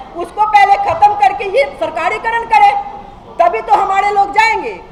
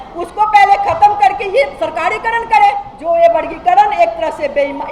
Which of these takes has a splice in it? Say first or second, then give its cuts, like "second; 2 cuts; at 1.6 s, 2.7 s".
second; 1 cut; at 2.9 s